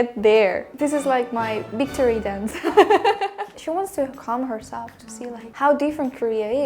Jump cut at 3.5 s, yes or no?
yes